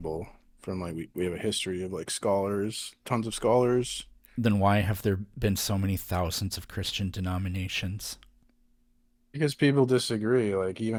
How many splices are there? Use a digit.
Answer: 0